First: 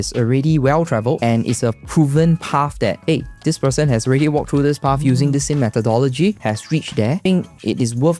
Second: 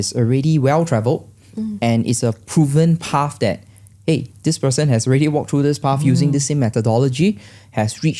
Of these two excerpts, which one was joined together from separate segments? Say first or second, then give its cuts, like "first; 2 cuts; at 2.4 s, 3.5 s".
first; 3 cuts; at 1.2 s, 3.0 s, 6.7 s